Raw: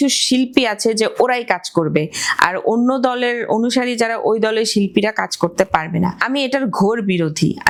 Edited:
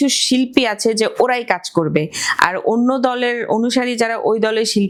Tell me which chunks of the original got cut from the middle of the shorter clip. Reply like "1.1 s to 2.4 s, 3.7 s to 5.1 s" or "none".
none